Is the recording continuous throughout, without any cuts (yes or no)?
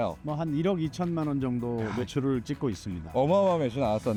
yes